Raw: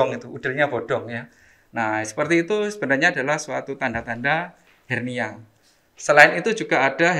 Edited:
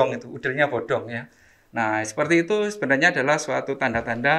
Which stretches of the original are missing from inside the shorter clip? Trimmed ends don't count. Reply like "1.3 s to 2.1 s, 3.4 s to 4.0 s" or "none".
none